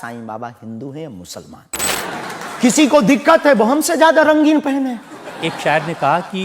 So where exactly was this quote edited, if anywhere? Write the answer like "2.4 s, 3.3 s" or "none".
1.8 s